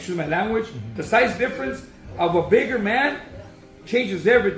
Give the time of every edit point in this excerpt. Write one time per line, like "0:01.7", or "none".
none